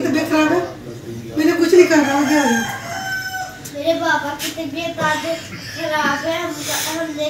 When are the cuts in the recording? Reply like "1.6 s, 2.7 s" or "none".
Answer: 3.8 s